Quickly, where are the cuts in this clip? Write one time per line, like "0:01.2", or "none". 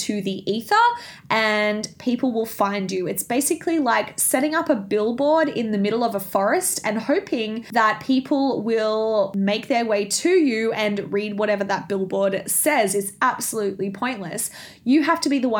0:07.6
0:09.3